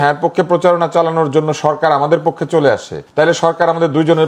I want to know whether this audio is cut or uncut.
cut